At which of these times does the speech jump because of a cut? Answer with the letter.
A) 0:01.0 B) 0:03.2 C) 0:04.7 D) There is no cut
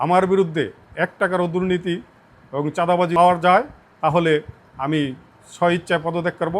B